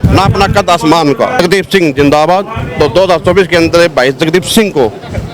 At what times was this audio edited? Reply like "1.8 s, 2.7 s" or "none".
1.4 s, 2.6 s